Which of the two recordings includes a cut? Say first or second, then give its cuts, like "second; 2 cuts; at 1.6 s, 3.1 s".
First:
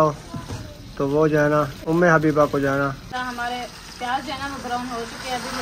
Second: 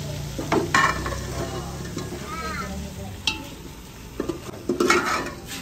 first; 1 cut; at 3.1 s